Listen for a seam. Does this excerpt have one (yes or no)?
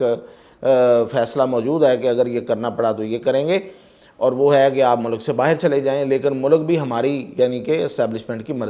no